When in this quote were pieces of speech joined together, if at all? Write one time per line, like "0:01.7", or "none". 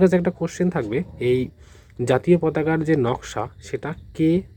none